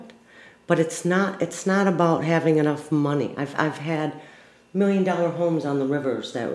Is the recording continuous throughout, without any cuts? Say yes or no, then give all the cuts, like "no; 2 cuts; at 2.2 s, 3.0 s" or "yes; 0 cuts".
yes; 0 cuts